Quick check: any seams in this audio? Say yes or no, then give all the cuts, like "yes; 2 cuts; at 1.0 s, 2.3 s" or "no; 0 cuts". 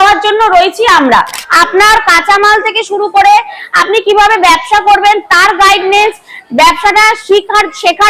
yes; 1 cut; at 1.4 s